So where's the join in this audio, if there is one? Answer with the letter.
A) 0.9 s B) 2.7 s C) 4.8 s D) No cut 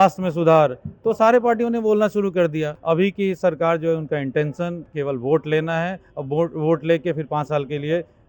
B